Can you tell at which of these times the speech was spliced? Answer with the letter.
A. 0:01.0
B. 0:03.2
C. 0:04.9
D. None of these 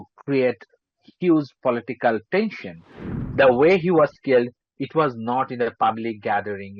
B